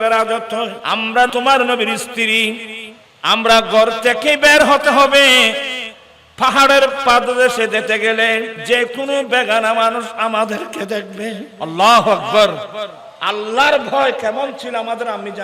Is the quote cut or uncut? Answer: cut